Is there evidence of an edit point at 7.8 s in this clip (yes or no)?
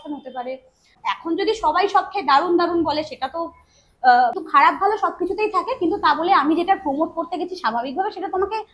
no